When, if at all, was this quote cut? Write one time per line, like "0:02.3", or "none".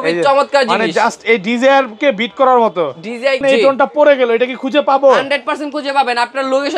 0:03.4